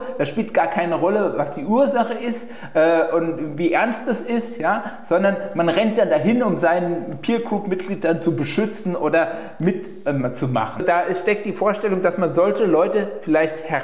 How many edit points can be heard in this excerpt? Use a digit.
1